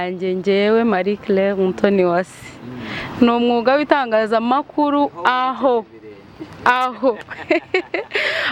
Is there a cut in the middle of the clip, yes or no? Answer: no